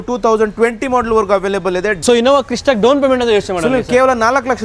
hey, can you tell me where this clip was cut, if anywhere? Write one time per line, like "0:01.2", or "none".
0:02.0